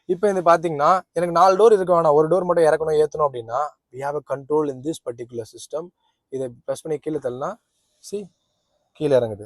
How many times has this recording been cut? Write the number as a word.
zero